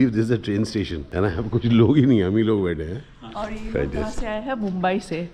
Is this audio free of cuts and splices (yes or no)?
no